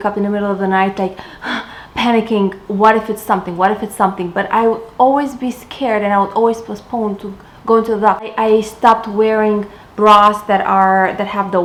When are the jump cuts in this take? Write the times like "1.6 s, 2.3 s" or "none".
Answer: none